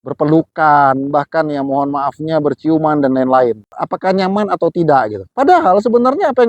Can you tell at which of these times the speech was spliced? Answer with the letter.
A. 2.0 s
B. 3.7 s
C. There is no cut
B